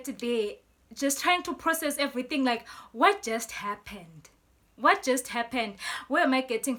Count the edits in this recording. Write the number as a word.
zero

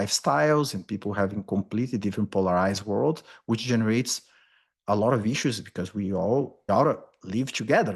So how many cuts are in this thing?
one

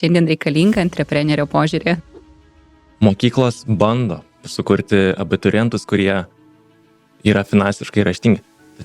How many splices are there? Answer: two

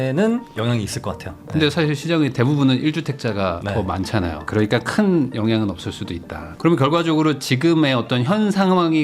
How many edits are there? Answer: two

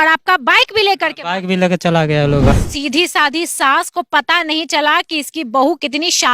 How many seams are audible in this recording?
one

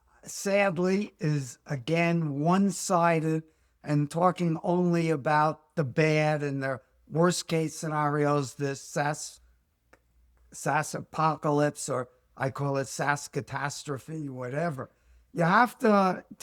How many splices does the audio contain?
zero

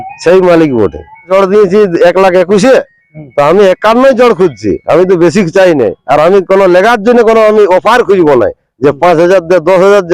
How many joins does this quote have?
one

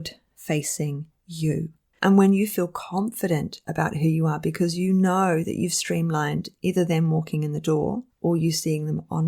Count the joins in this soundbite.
one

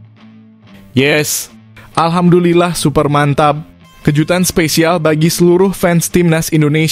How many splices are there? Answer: one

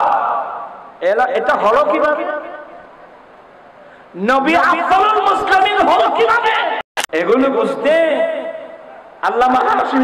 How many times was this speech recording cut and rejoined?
one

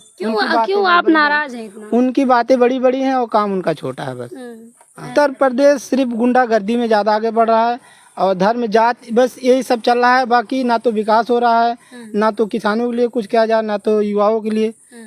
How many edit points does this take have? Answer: one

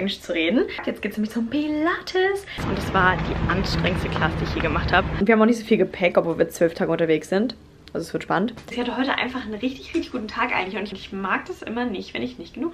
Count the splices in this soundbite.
five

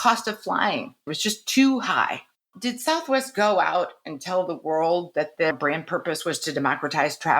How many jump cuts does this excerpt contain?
two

